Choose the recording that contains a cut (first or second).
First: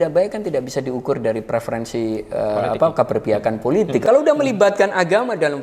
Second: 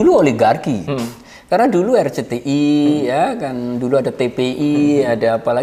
first